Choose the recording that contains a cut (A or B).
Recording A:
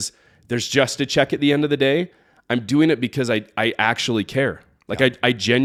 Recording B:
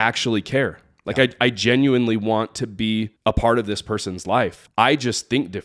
B